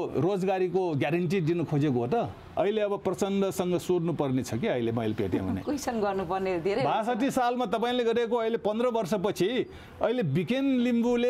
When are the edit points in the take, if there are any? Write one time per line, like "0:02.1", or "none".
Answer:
0:02.5